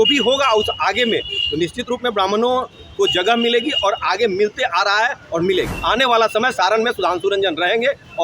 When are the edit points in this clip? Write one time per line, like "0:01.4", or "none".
0:05.8